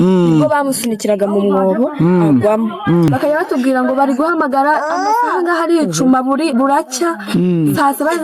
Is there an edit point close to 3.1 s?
yes; 1 cut; at 3.1 s

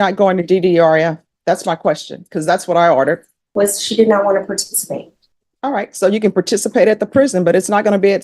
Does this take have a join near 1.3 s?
no; 1 cut; at 3.4 s

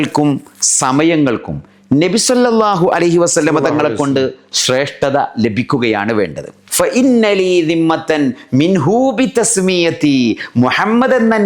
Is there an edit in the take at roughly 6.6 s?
yes; 1 cut; at 6.6 s

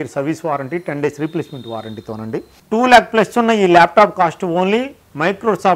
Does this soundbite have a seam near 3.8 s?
no; 1 cut; at 2.6 s

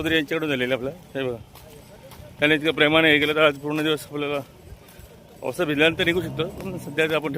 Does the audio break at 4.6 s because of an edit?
no; 1 cut; at 1.0 s

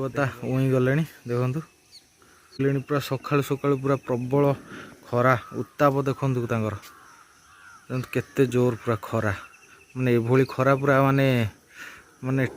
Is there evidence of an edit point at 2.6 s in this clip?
yes; 1 cut; at 2.6 s

